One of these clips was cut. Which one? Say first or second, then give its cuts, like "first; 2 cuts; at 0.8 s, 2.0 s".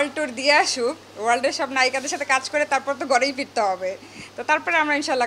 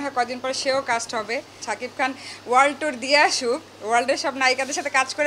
second; 1 cut; at 1.5 s